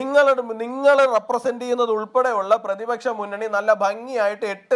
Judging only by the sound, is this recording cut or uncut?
uncut